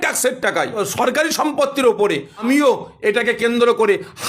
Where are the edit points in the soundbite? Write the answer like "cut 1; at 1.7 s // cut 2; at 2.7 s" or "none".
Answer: cut 1; at 0.8 s // cut 2; at 2.4 s